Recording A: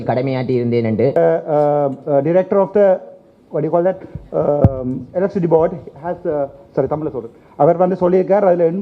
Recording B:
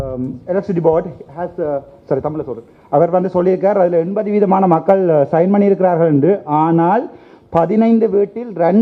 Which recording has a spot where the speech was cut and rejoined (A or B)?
A